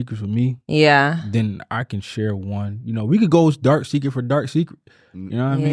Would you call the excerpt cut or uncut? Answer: uncut